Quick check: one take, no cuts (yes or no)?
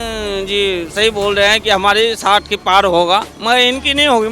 no